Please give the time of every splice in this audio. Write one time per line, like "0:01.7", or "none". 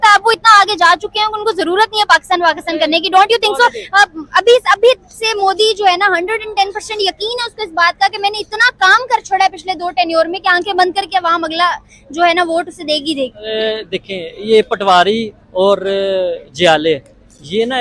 none